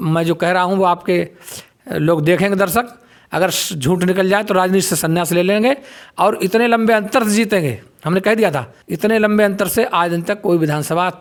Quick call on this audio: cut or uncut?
uncut